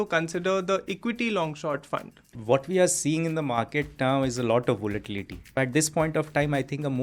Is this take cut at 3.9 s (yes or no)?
no